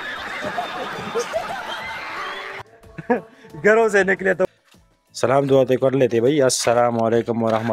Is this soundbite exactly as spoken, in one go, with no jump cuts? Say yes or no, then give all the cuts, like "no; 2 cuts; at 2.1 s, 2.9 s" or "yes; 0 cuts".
no; 1 cut; at 4.5 s